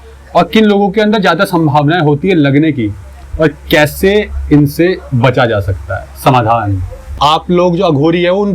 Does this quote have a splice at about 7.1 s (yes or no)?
yes